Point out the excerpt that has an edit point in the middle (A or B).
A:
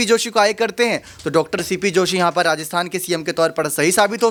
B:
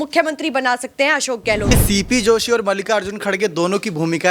B